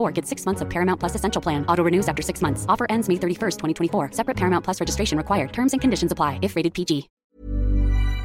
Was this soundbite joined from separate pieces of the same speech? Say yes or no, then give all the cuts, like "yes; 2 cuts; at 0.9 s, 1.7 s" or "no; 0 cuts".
yes; 1 cut; at 7.2 s